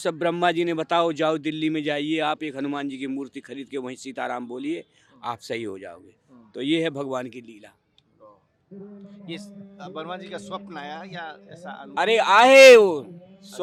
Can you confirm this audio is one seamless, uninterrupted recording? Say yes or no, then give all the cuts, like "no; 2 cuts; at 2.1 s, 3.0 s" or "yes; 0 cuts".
yes; 0 cuts